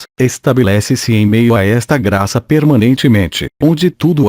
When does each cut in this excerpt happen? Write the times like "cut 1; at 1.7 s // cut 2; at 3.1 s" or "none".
cut 1; at 2.0 s // cut 2; at 3.0 s